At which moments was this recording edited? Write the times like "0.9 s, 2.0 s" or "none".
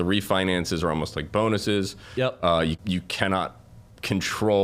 2.8 s